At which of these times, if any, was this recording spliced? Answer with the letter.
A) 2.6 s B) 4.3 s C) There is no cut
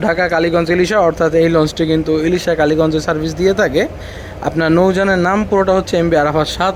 C